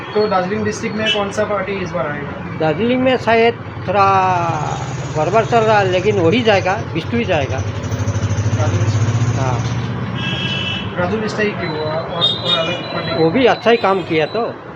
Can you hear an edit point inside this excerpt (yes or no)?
no